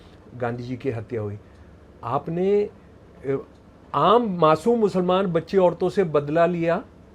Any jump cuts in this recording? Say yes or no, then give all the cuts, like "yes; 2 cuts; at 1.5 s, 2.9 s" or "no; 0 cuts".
no; 0 cuts